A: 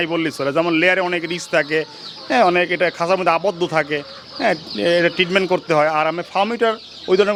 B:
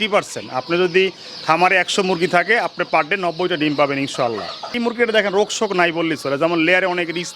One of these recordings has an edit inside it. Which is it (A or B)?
B